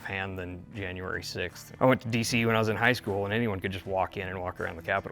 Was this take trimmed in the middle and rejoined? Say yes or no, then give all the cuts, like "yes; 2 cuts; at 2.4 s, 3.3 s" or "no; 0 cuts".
yes; 1 cut; at 1.6 s